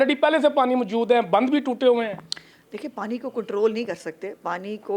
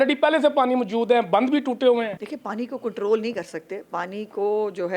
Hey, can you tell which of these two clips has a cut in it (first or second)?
second